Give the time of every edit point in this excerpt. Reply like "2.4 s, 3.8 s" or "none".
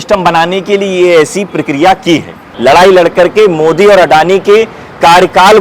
2.4 s

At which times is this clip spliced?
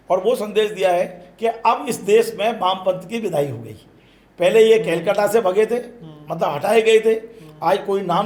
none

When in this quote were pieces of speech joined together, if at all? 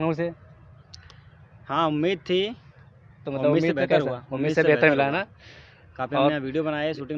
none

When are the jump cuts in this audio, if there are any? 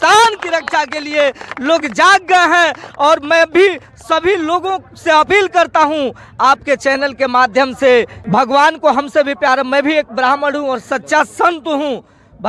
8.2 s

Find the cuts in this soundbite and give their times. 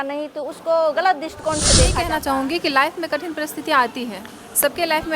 1.7 s

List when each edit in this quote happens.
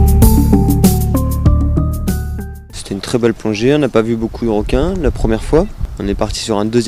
none

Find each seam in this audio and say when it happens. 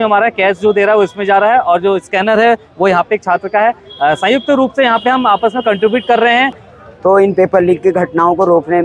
6.6 s

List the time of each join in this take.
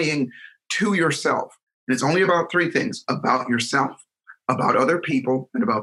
none

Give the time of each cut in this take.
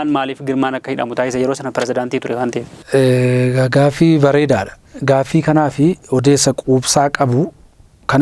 none

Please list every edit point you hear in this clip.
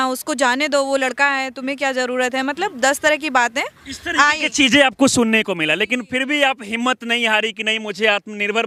none

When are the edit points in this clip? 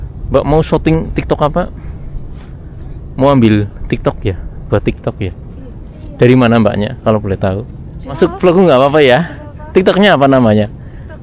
8.2 s

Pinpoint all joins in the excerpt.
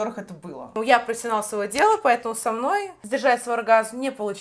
0.8 s, 3.0 s

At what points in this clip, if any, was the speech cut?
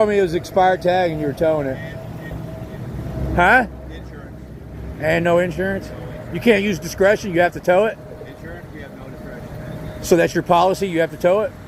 none

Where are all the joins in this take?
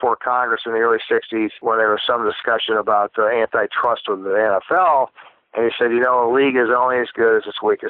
1.6 s

